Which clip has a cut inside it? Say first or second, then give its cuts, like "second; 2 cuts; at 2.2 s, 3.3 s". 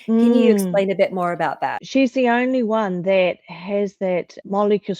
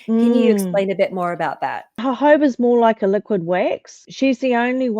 first; 1 cut; at 1.7 s